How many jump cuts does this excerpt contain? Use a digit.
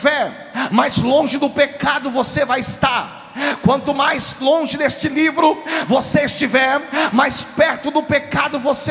1